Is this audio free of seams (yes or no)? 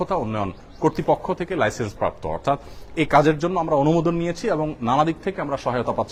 yes